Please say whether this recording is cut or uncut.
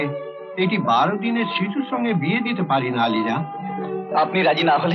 uncut